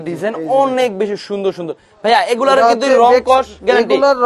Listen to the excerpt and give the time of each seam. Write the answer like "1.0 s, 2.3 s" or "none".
none